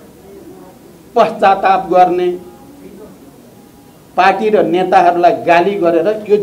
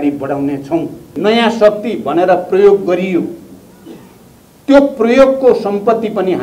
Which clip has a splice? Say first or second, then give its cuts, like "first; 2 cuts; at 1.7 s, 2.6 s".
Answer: second; 1 cut; at 1.1 s